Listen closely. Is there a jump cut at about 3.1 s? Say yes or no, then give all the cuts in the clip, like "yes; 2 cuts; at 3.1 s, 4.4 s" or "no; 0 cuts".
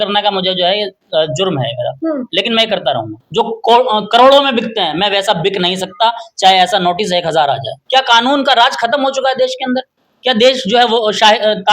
yes; 2 cuts; at 3.1 s, 7.7 s